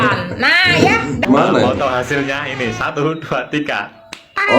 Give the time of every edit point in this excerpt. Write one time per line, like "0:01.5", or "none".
0:01.2

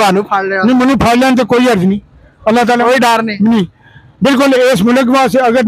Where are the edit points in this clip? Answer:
none

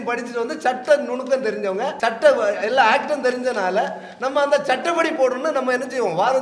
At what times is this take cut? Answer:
0:01.9

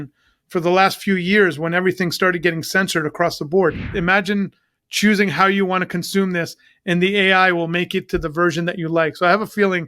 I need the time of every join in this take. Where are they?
0:03.9

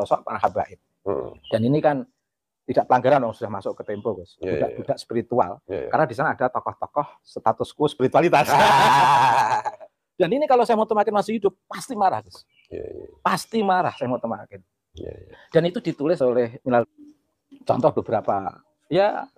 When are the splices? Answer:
0:16.9

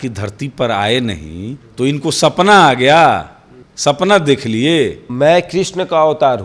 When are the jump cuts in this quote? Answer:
none

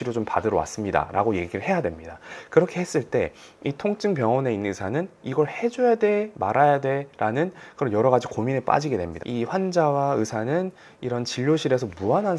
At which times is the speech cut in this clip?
0:09.1

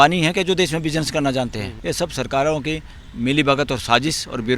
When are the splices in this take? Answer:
0:01.7

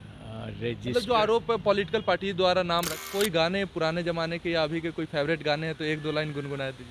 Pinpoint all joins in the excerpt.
0:02.9

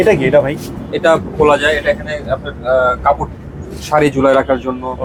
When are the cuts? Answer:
none

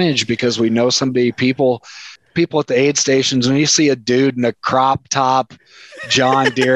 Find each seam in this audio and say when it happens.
0:02.1

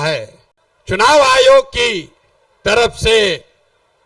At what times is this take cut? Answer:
0:01.1

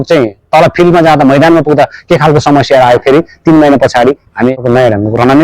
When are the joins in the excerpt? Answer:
0:04.5

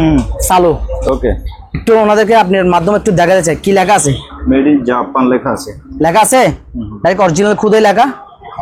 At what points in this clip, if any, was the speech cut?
none

